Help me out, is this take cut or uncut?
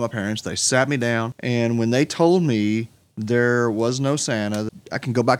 cut